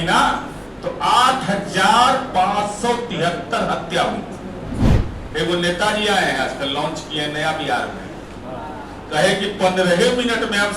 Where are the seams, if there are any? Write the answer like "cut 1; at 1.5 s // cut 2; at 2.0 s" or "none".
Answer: cut 1; at 4.9 s